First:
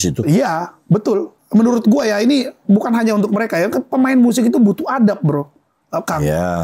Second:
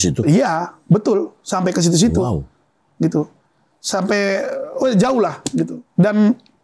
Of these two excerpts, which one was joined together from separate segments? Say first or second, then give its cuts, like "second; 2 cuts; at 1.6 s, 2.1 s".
first; 1 cut; at 1.4 s